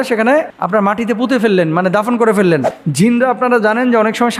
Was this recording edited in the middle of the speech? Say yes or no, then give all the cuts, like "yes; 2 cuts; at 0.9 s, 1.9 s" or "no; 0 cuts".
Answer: yes; 1 cut; at 2.8 s